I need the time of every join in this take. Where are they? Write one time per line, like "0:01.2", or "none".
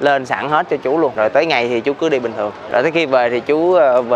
0:01.1
0:02.6